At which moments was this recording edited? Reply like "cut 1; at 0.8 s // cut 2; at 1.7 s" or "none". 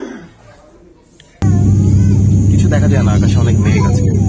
cut 1; at 1.5 s